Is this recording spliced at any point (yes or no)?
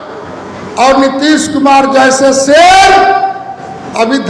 no